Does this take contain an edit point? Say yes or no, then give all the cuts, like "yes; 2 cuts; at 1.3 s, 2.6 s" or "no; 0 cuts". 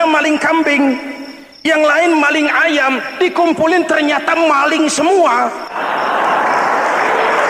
yes; 1 cut; at 5.7 s